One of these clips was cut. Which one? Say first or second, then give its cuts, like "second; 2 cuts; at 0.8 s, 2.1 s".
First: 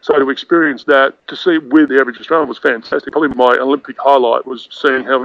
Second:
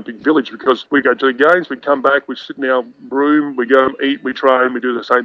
first; 1 cut; at 3.1 s